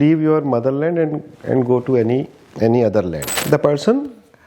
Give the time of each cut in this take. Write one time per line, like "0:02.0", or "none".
0:03.4